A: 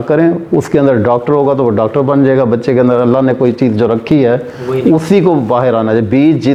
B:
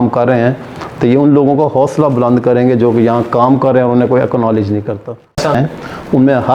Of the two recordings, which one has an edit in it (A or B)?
B